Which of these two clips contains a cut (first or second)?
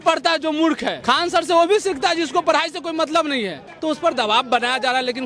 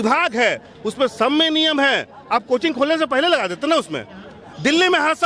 first